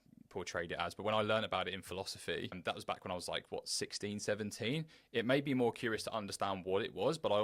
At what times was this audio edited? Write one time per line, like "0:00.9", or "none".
0:02.6